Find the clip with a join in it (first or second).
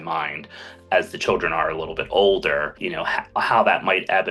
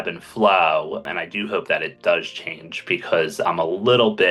second